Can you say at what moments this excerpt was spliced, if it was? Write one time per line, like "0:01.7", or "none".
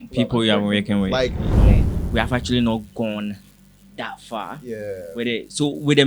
0:01.6